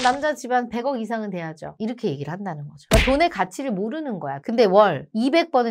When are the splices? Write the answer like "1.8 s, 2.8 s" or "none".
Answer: 4.3 s